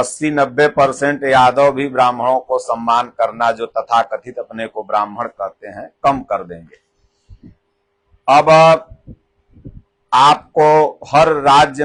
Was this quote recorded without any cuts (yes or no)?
yes